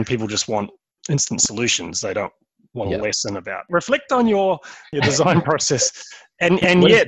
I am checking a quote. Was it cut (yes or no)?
yes